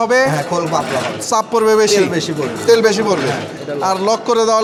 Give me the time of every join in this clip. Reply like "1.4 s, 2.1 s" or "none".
none